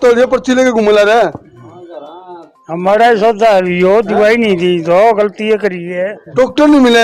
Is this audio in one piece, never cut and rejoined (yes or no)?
yes